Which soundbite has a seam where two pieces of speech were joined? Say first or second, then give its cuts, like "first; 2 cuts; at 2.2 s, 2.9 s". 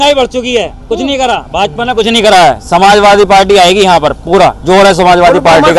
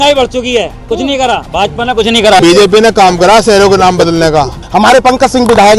second; 2 cuts; at 2.4 s, 4.6 s